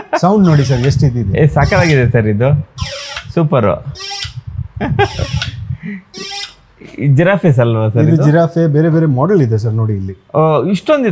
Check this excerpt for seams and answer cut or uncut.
uncut